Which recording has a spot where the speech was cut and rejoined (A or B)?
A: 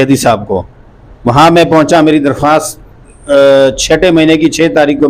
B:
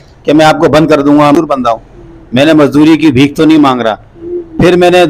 B